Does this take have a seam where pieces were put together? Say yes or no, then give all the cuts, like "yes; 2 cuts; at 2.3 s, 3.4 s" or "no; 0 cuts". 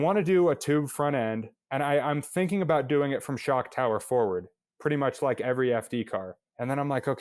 no; 0 cuts